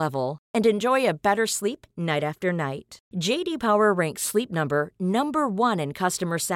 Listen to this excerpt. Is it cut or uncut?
uncut